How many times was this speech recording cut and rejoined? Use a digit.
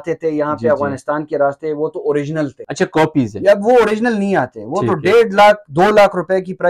1